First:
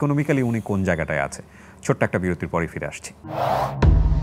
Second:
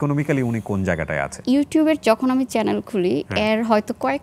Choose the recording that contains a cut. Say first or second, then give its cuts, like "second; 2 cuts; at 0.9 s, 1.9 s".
second; 1 cut; at 1.3 s